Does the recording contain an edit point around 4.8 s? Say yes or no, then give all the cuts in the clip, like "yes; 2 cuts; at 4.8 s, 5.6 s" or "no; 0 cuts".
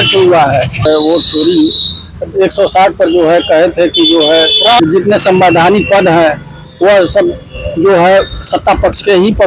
yes; 2 cuts; at 0.9 s, 4.8 s